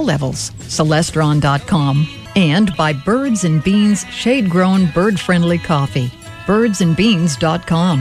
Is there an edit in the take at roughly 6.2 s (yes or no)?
no